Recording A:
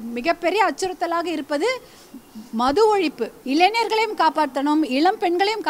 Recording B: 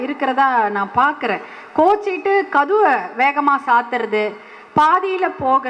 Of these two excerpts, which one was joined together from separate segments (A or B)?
A